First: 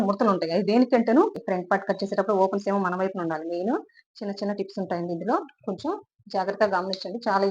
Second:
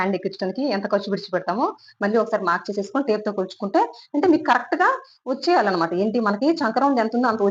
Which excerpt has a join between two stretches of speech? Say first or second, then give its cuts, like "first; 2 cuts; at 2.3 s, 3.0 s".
first; 1 cut; at 1.4 s